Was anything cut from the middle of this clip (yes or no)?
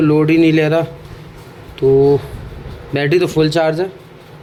no